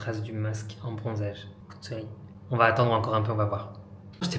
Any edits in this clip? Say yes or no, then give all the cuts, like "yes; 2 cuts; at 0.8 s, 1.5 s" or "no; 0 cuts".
no; 0 cuts